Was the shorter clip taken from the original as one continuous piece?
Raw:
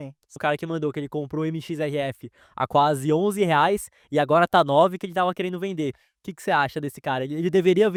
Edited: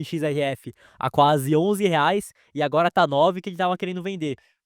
yes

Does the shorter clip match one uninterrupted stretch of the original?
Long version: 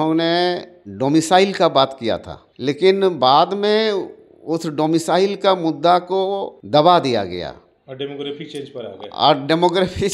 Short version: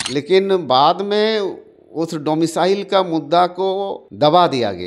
yes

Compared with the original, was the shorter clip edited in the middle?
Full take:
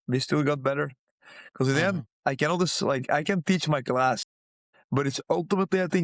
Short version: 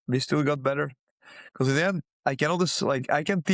no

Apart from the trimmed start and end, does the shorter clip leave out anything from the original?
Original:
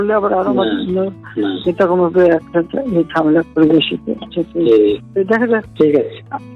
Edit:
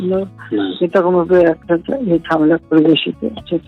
no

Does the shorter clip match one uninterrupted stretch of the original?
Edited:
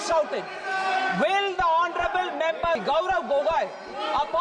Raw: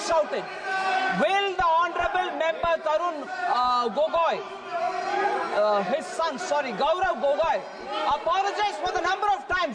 no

